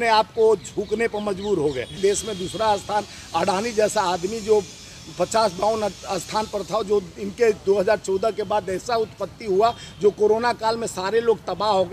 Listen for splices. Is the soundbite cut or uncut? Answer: cut